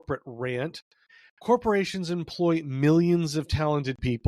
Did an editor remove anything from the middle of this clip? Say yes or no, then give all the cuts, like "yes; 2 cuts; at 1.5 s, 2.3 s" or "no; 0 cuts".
yes; 1 cut; at 1.1 s